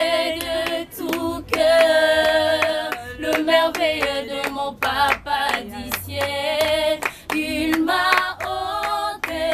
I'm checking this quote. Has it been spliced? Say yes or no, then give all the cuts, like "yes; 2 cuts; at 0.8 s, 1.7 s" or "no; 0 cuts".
no; 0 cuts